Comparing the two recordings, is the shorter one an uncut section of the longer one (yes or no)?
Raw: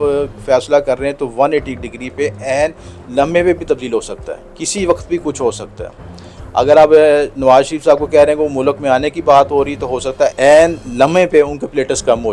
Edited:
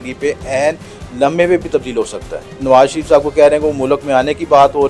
no